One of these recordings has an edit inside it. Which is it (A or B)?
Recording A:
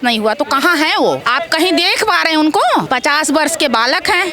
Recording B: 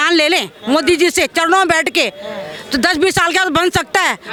A